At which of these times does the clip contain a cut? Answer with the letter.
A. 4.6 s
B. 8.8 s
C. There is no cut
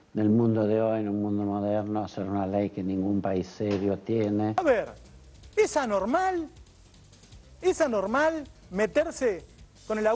A